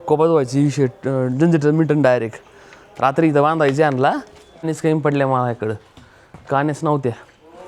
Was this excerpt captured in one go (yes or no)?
no